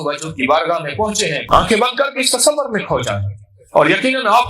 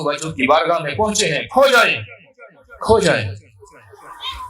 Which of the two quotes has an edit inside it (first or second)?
first